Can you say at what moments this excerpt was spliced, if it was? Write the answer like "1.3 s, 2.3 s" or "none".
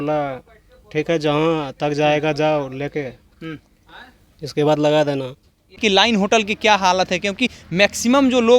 5.8 s